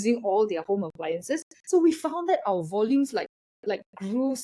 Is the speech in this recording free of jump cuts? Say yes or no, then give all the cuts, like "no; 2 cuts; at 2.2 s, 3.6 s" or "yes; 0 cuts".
yes; 0 cuts